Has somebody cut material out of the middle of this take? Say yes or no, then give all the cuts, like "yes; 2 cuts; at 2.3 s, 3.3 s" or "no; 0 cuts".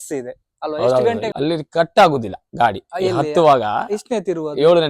yes; 1 cut; at 1.3 s